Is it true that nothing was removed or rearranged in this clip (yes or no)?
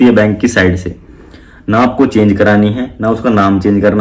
yes